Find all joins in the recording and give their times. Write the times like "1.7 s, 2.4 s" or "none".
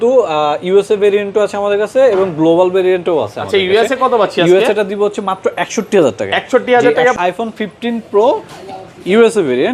7.1 s